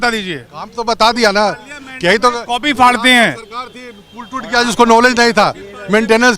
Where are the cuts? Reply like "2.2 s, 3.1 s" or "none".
none